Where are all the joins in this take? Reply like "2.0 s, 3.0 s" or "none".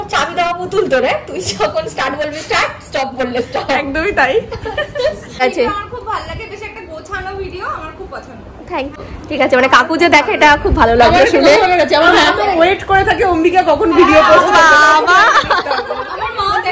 5.4 s, 9.0 s